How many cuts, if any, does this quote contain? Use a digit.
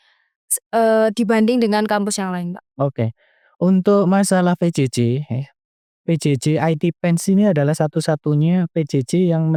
0